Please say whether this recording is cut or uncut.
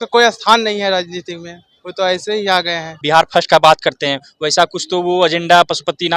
cut